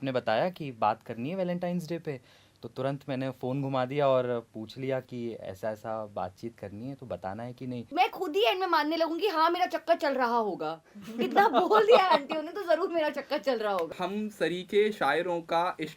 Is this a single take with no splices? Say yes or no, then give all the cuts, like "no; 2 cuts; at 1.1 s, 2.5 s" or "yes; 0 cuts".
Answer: no; 2 cuts; at 7.9 s, 13.9 s